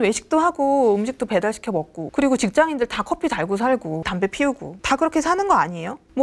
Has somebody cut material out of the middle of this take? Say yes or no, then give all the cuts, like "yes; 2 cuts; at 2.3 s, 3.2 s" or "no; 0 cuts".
yes; 2 cuts; at 2.0 s, 4.0 s